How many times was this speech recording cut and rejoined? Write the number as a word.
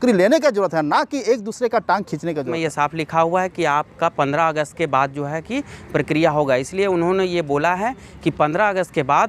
one